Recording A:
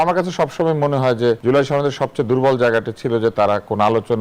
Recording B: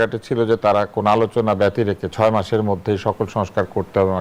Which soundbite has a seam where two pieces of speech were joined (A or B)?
A